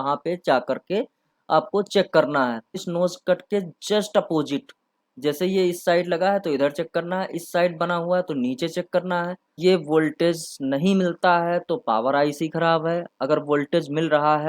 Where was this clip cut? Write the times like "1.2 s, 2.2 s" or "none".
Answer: 2.8 s, 9.5 s